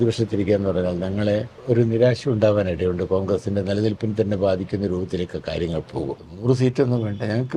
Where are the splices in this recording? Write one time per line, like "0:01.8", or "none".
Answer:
0:01.5
0:06.4